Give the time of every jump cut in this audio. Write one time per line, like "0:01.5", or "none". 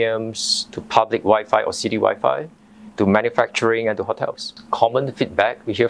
0:04.5